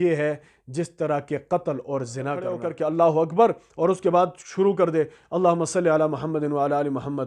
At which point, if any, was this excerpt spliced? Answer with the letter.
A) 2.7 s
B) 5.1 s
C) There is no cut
A